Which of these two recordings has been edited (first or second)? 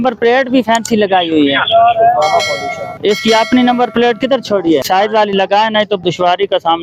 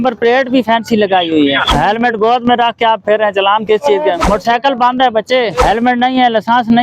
second